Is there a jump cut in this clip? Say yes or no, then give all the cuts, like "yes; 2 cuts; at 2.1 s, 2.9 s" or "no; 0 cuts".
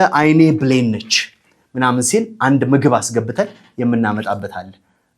no; 0 cuts